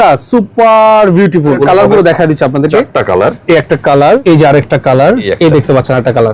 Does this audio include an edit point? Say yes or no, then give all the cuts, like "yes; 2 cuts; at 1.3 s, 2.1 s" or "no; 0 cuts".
yes; 3 cuts; at 1.6 s, 4.2 s, 5.3 s